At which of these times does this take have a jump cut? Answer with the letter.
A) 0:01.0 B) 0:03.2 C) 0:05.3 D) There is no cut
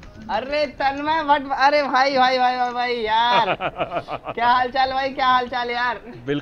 D